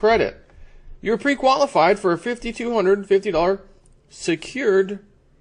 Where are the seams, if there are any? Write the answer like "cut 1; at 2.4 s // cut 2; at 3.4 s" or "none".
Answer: none